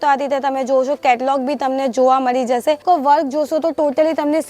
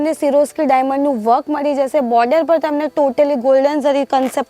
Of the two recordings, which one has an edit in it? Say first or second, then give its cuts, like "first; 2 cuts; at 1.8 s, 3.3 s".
first; 1 cut; at 2.8 s